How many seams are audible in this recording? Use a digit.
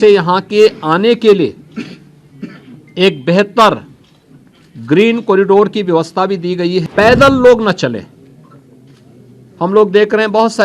1